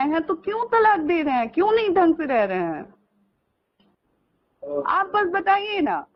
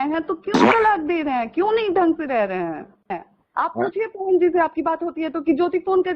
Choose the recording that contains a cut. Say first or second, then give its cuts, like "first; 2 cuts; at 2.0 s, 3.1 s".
second; 1 cut; at 3.3 s